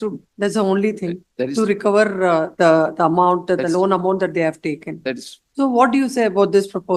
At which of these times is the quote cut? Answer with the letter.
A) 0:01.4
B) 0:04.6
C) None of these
C